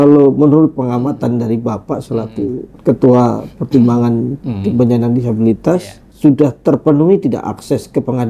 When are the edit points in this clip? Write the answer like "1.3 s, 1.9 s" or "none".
0.7 s, 2.7 s, 6.1 s